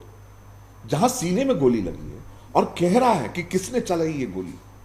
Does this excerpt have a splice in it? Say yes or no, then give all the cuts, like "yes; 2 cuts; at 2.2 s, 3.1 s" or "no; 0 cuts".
no; 0 cuts